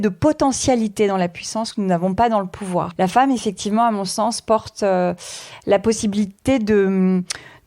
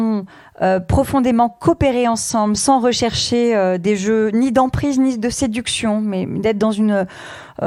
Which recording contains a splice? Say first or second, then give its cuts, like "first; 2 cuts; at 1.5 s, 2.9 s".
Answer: first; 1 cut; at 2.9 s